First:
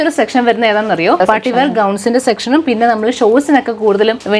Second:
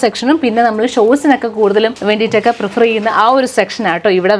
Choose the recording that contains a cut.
first; 1 cut; at 1.2 s

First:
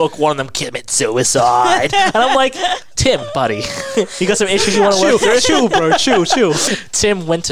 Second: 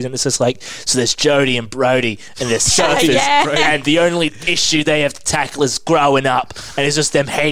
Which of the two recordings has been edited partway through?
first; 2 cuts; at 2.9 s, 6.6 s

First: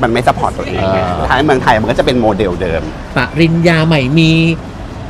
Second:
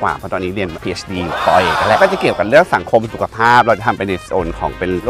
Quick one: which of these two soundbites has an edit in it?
second; 1 cut; at 2.0 s

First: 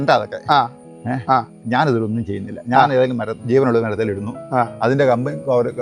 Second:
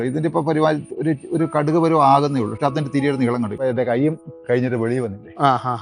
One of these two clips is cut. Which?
second; 1 cut; at 3.6 s

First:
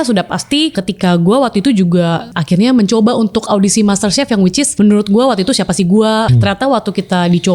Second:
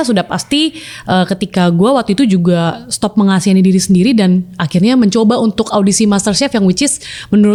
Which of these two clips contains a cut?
first; 4 cuts; at 0.8 s, 2.3 s, 4.7 s, 6.3 s

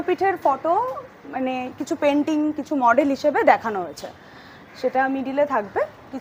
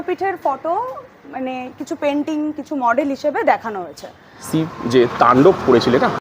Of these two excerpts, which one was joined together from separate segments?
second; 1 cut; at 4.4 s

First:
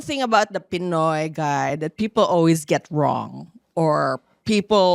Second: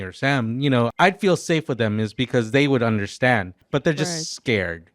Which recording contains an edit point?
second; 2 cuts; at 0.9 s, 3.6 s

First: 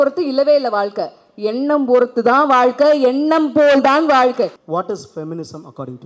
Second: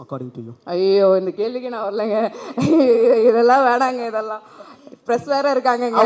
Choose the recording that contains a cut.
first; 1 cut; at 4.6 s

